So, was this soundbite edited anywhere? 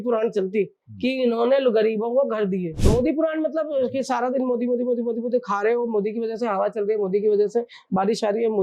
yes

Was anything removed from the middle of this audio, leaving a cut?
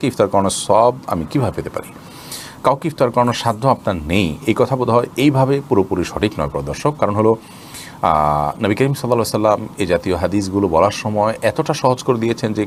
no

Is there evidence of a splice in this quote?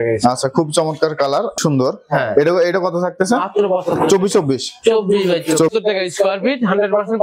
yes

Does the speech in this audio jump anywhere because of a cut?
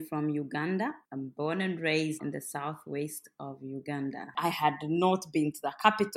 yes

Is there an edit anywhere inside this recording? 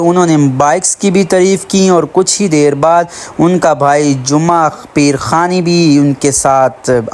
no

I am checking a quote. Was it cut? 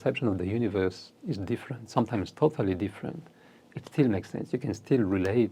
no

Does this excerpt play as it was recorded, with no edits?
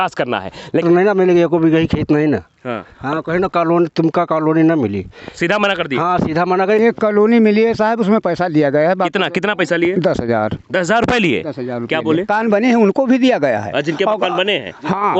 no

